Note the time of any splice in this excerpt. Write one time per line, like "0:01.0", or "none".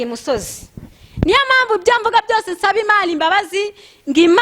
none